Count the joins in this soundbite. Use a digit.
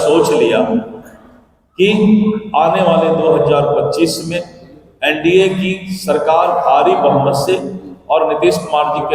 0